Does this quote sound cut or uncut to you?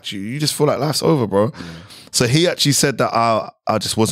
uncut